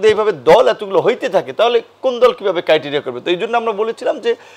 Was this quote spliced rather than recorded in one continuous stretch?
no; 0 cuts

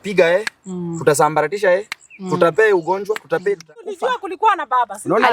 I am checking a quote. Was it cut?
yes; 1 cut; at 4.0 s

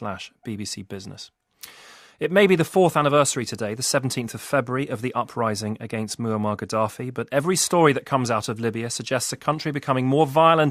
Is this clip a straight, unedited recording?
no; 1 cut; at 3.1 s

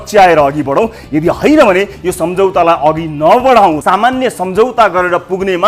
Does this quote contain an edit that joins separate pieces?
yes; 1 cut; at 3.8 s

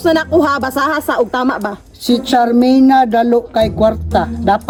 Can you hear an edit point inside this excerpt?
no; 0 cuts

